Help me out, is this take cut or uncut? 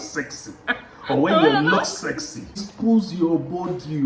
cut